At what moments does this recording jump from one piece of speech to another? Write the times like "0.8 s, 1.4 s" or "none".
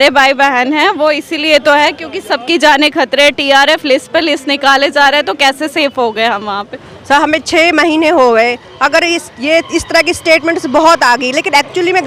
none